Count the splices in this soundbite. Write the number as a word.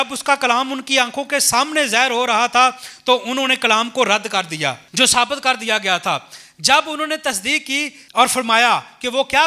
two